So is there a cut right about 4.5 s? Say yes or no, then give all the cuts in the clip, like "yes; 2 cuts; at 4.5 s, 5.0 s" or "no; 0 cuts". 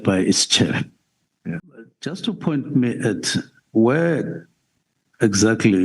no; 1 cut; at 2.2 s